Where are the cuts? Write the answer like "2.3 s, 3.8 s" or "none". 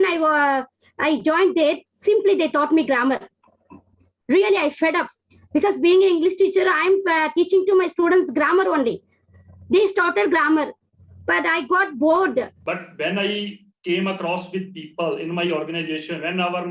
12.6 s